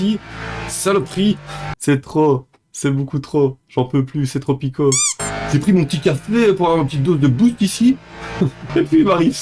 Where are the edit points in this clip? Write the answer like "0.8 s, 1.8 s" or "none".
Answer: 1.7 s, 5.1 s

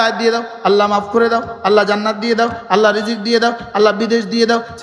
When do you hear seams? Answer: none

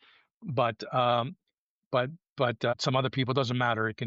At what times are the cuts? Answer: 2.7 s

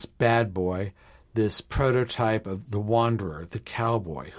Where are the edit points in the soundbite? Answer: none

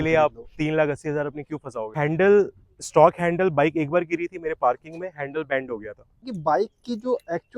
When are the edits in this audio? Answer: 1.9 s, 6.3 s

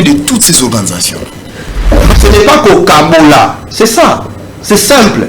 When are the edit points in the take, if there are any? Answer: 2.1 s

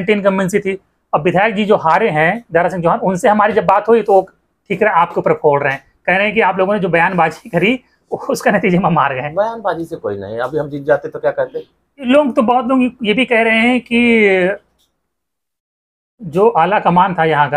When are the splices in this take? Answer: 12.0 s

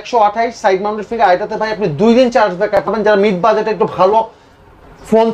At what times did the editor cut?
2.9 s

